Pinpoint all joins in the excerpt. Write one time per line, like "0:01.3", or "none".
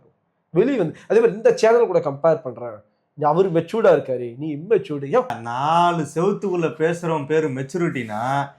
0:05.4